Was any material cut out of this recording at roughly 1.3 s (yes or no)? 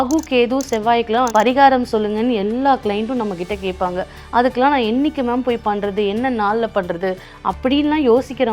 yes